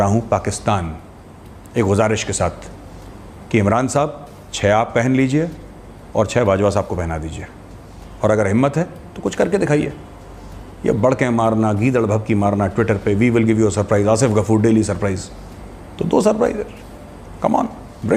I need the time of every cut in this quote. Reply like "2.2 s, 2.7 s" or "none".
none